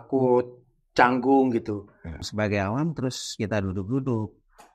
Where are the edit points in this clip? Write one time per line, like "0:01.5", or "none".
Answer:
0:02.3